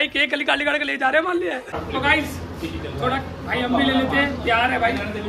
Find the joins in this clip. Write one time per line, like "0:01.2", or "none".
0:01.7